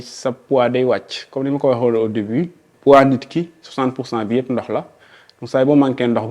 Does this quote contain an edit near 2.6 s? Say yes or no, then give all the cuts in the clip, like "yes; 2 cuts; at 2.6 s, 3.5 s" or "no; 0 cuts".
yes; 1 cut; at 2.6 s